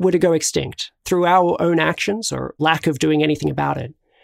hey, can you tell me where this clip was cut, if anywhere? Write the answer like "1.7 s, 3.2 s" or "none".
1.0 s, 2.5 s

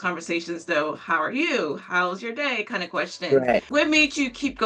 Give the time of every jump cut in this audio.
3.7 s

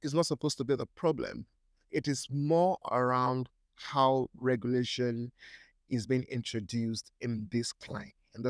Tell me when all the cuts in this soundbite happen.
none

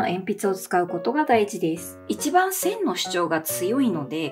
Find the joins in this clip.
1.9 s

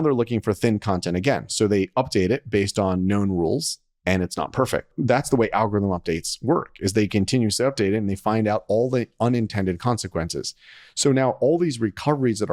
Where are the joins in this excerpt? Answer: none

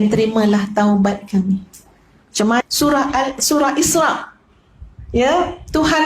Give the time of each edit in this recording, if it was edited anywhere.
2.6 s

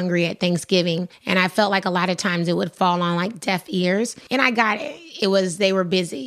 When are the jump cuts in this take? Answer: 1.1 s, 4.2 s

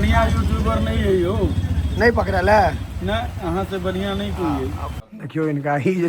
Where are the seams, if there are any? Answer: 4.9 s

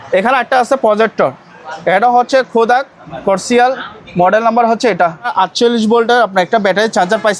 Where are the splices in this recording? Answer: 5.3 s

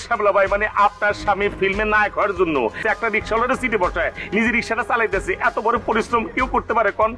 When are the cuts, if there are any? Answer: 2.8 s

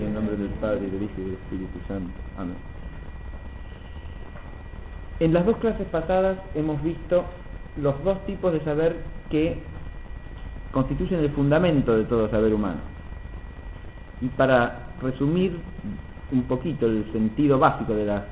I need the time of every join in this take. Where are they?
none

